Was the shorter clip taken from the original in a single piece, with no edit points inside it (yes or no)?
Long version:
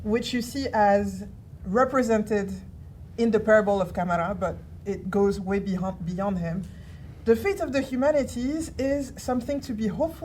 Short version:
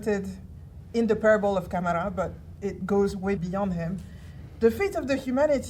no